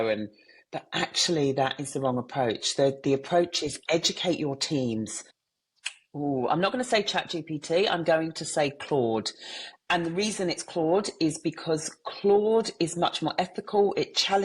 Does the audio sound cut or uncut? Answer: cut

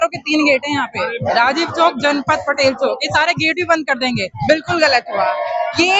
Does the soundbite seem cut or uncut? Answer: cut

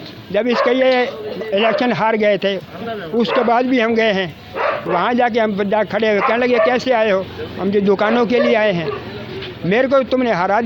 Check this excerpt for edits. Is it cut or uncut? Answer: uncut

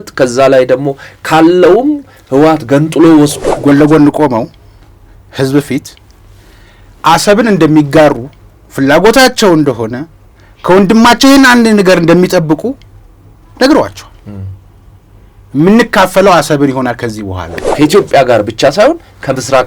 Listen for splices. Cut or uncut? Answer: cut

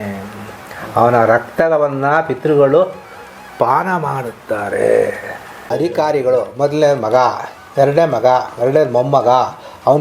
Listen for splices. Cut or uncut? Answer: cut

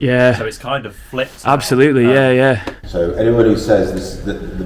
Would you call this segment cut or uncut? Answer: cut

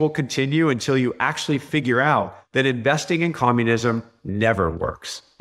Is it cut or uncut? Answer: uncut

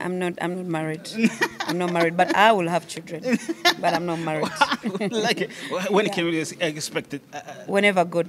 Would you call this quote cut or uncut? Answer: uncut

